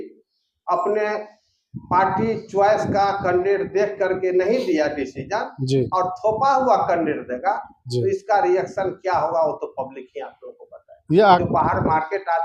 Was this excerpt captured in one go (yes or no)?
no